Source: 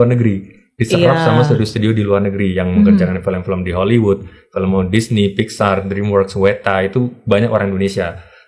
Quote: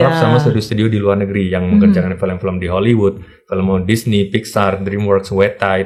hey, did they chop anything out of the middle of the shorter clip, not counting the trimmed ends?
no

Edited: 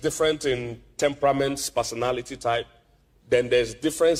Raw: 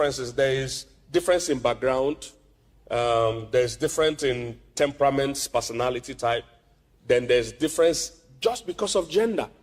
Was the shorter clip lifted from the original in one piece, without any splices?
yes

